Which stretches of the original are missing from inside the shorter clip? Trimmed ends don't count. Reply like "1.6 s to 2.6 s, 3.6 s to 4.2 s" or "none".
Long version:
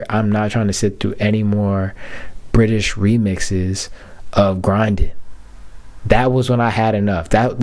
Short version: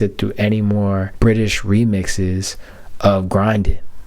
1.9 s to 2.4 s

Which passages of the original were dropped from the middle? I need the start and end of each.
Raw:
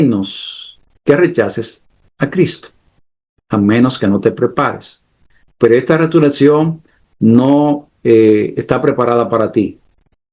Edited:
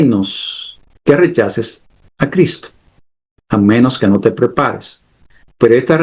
none

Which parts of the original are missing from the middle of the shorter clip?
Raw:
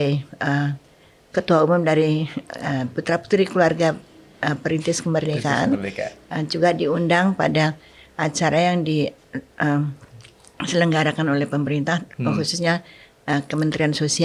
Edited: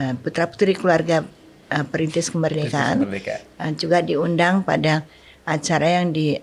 none

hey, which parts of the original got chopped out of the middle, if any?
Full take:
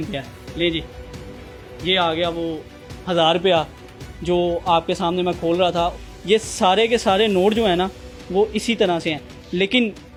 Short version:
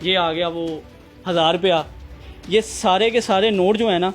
4.1 s to 6.1 s

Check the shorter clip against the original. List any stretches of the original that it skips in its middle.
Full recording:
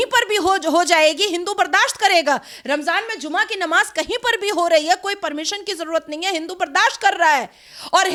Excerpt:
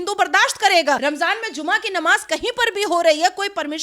2.4 s to 2.7 s

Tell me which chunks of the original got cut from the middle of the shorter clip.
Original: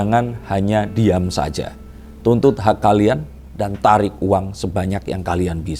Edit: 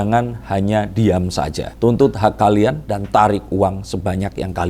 1.6 s to 2.1 s, 3.3 s to 3.6 s

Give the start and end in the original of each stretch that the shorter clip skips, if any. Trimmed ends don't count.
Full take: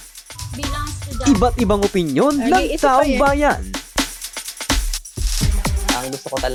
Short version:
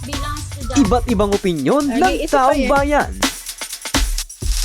3.6 s to 3.9 s

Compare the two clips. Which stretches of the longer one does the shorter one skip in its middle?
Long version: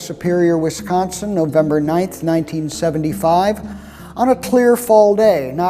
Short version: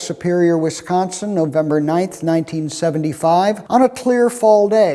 3.6 s to 4.1 s

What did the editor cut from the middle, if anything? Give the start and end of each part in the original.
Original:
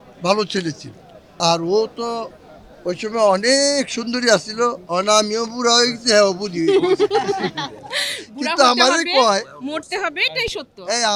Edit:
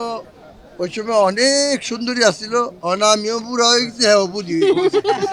none

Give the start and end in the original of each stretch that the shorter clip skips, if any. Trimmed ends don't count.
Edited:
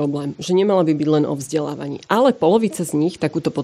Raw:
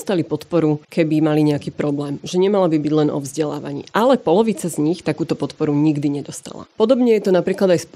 none

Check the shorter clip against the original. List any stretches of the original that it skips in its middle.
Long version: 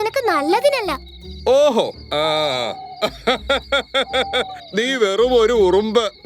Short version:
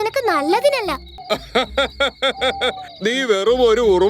1.1 s to 2.9 s

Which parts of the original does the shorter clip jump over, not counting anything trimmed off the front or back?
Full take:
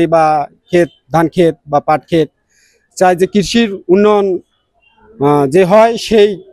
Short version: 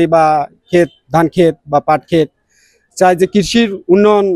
none

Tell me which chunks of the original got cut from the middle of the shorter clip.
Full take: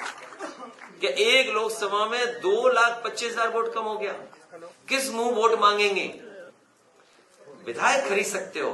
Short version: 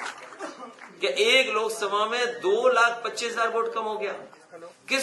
none

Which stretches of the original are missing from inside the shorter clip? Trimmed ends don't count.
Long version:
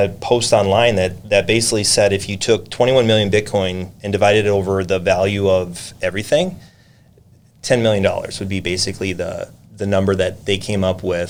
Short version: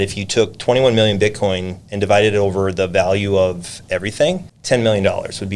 6.6 s to 7.5 s

